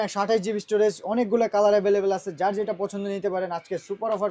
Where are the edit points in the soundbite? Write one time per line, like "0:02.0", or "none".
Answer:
none